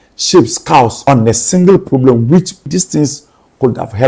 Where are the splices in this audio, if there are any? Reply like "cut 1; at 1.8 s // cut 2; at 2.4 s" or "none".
cut 1; at 1.0 s // cut 2; at 2.7 s

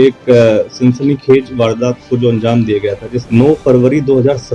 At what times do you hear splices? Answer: cut 1; at 3.1 s

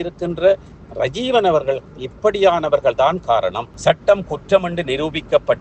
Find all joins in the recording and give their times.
cut 1; at 3.7 s

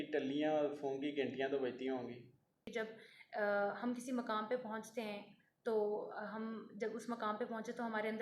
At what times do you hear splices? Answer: cut 1; at 2.7 s

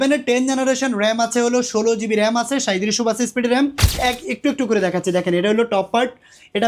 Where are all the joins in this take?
cut 1; at 4.0 s

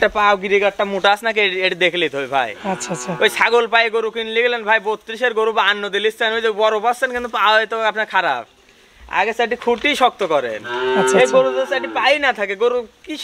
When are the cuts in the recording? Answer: none

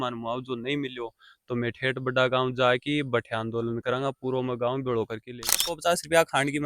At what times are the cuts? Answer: cut 1; at 5.7 s

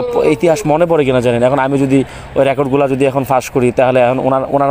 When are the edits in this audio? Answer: none

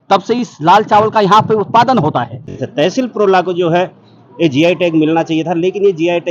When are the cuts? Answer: cut 1; at 2.6 s

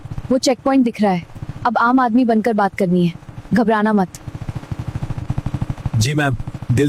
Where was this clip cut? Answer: none

